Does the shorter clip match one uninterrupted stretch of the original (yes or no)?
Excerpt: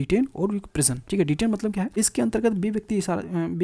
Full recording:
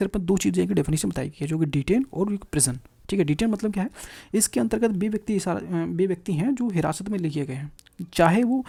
no